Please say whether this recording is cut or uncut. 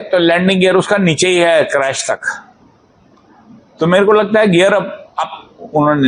uncut